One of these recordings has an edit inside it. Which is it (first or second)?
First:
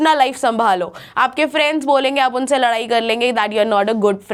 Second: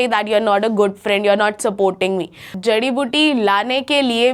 second